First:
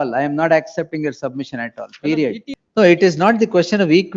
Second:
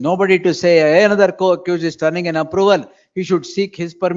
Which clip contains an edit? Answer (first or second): first